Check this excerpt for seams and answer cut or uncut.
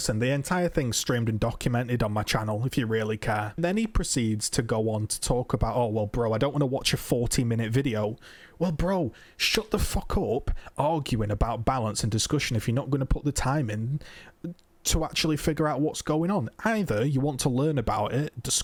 uncut